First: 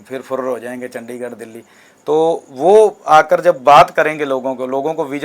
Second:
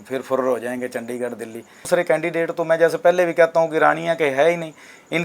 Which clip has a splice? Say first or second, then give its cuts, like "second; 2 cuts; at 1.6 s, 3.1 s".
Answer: second; 1 cut; at 1.8 s